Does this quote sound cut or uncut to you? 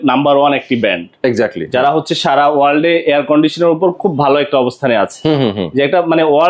uncut